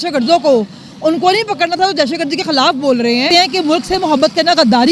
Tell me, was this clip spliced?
yes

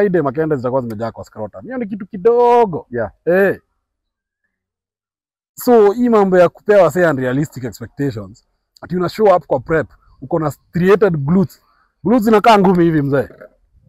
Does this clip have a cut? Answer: no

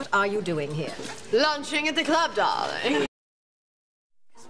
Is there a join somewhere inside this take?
no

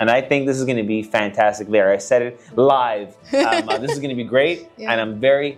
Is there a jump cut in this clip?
no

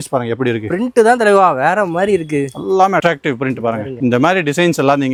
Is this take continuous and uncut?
yes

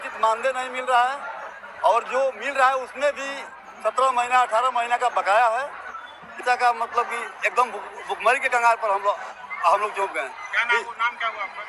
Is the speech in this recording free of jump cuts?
no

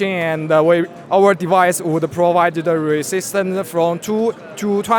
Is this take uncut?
yes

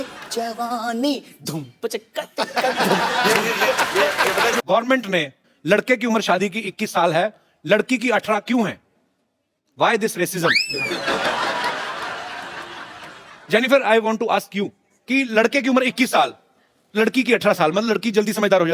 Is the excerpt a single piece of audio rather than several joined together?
no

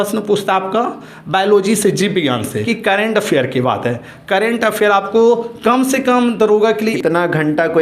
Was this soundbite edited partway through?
yes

